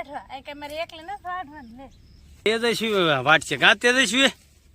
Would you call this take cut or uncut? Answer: cut